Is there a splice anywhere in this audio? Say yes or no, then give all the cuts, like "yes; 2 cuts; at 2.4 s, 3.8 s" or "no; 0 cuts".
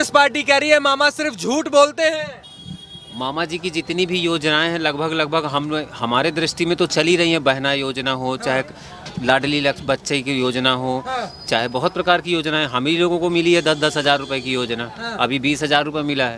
no; 0 cuts